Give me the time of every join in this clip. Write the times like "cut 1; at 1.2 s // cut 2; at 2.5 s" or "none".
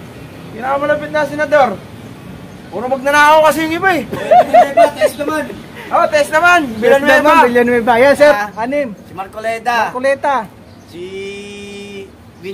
cut 1; at 8.3 s